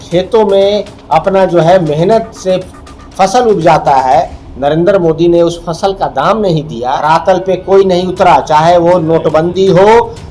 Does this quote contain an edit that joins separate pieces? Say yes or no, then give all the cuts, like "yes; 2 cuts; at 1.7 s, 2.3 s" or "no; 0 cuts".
yes; 1 cut; at 7.0 s